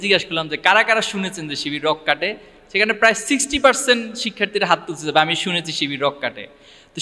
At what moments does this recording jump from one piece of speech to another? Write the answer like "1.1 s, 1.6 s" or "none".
none